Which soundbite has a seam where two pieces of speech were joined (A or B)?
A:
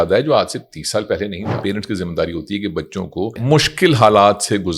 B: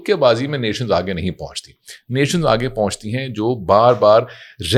A